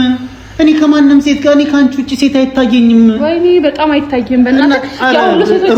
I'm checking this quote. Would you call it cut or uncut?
uncut